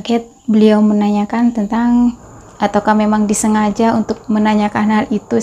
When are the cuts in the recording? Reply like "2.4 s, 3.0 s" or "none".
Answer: 2.2 s